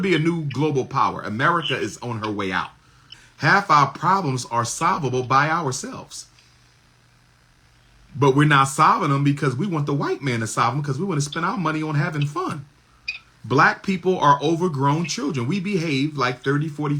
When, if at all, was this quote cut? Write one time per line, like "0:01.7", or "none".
0:03.2